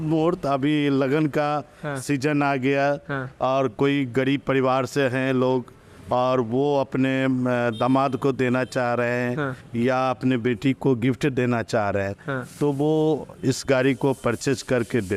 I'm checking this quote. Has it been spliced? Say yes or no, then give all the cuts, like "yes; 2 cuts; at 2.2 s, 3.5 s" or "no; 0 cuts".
no; 0 cuts